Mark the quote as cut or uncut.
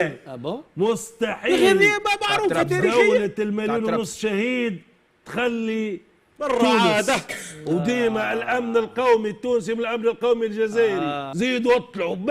cut